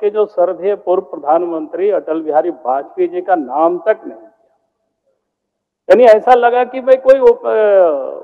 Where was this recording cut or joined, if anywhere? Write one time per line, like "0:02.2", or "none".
none